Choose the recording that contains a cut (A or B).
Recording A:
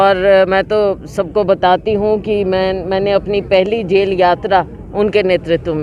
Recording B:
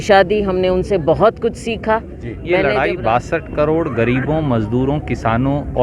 B